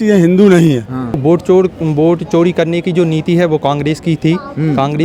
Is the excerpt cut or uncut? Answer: cut